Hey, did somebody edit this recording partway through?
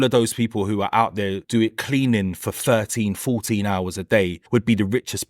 yes; 2 cuts; at 1.4 s, 4.4 s

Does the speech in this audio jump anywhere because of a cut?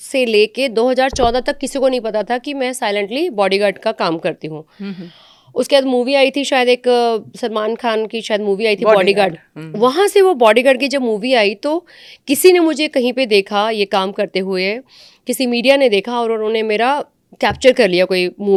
no; 0 cuts

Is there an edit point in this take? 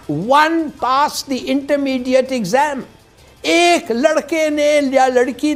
no; 0 cuts

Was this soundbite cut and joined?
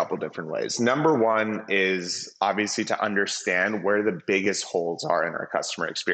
no; 0 cuts

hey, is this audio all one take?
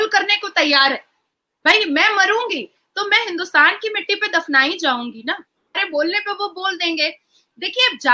no; 1 cut; at 5.8 s

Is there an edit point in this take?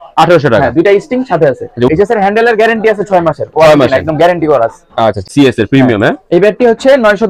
yes; 2 cuts; at 1.9 s, 5.2 s

